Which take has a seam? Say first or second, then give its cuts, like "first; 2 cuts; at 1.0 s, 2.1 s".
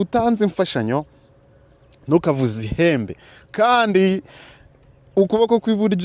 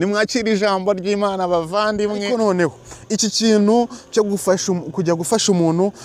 second; 1 cut; at 2.2 s